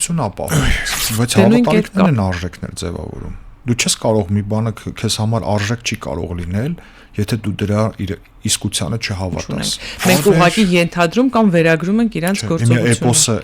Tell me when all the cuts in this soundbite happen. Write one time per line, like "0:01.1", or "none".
0:01.9
0:09.5

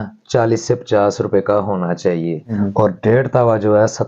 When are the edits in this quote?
0:02.5

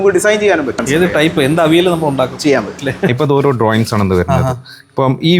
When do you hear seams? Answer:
0:03.1

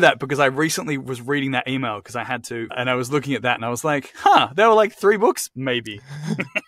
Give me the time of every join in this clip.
0:02.7

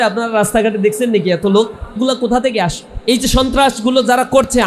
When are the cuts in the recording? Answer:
0:02.0
0:02.9

